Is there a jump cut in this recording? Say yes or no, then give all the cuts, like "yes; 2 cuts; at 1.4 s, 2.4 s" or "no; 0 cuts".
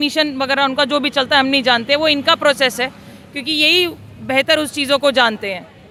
no; 0 cuts